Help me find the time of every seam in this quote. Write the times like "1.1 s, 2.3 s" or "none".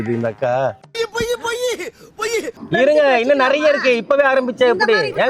2.6 s